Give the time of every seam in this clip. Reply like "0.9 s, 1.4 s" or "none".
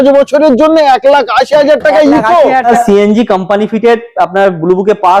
2.7 s